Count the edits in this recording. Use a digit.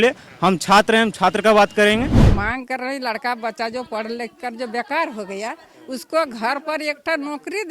1